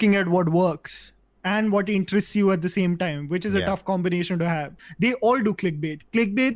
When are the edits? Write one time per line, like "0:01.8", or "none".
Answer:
0:04.8